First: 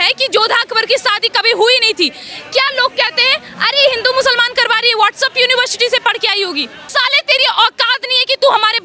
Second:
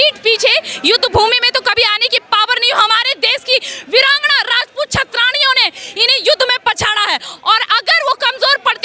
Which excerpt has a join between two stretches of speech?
first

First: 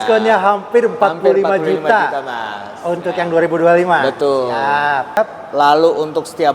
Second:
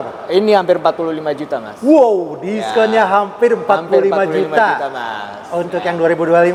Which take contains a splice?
first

